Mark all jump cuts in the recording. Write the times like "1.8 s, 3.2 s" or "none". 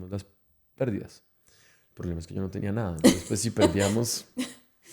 none